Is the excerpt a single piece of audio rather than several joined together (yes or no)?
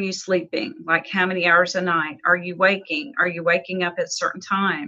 yes